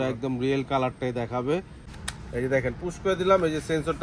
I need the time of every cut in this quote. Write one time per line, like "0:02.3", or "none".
0:01.7